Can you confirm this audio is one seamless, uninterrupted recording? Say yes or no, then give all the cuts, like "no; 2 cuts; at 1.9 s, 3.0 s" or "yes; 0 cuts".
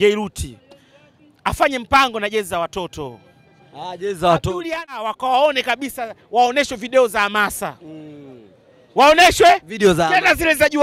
no; 1 cut; at 5.0 s